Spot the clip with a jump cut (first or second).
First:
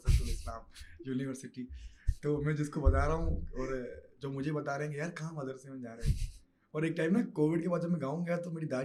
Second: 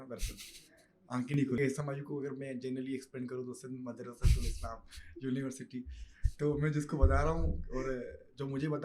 second